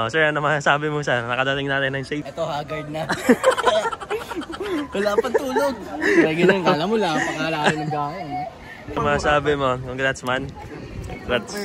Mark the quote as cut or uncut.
uncut